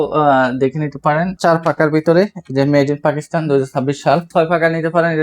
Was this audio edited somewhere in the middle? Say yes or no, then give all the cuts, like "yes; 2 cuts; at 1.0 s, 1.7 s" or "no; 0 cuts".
yes; 2 cuts; at 1.4 s, 4.3 s